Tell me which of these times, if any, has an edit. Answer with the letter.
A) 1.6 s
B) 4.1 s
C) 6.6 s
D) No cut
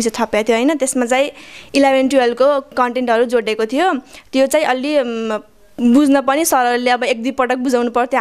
D